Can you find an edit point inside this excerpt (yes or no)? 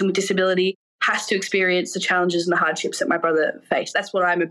no